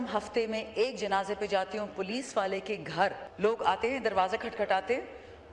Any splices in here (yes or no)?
yes